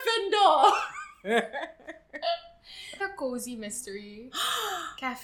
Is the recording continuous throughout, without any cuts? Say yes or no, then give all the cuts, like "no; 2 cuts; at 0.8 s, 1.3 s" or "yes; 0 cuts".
no; 1 cut; at 3.0 s